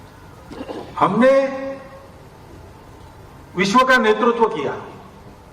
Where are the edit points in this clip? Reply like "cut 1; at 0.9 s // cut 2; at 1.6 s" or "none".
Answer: cut 1; at 2.4 s